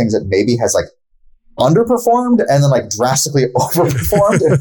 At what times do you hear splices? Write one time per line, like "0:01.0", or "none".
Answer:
none